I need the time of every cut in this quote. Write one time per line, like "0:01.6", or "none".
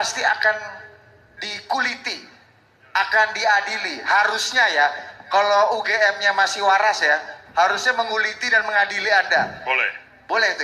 none